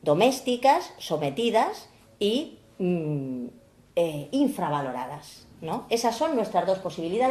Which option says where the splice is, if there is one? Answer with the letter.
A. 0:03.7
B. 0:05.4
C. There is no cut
A